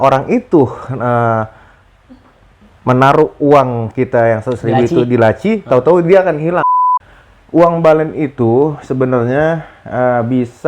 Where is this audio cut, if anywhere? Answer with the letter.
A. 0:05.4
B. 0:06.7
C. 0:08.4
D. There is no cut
B